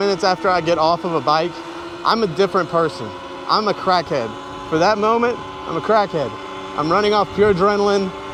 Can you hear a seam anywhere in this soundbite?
no; 0 cuts

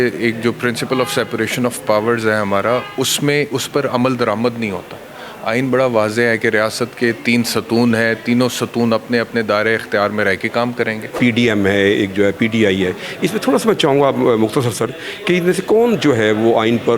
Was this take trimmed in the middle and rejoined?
yes; 1 cut; at 11.1 s

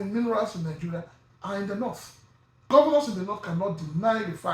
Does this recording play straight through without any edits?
no; 1 cut; at 2.6 s

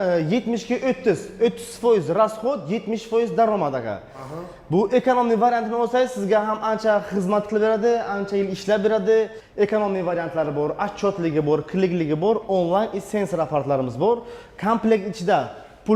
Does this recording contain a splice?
yes; 1 cut; at 9.4 s

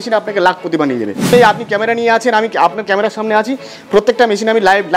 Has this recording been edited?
yes; 1 cut; at 1.3 s

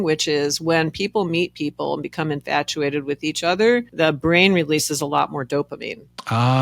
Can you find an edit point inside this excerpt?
no; 0 cuts

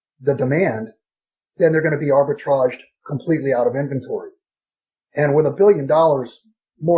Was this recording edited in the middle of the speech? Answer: no; 0 cuts

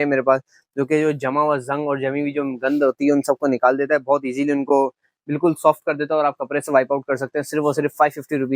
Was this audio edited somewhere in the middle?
no; 0 cuts

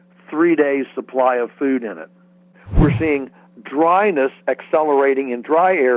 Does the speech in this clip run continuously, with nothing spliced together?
no; 1 cut; at 2.6 s

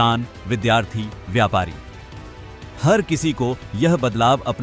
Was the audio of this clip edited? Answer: no; 0 cuts

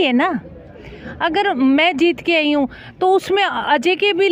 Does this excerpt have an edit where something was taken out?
no; 0 cuts

